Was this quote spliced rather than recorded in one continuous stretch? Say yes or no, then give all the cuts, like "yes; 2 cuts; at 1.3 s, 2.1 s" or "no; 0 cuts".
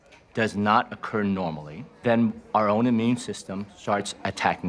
yes; 1 cut; at 2.0 s